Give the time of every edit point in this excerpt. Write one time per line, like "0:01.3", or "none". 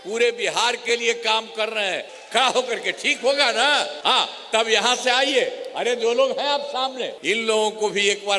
0:02.1
0:03.9
0:07.1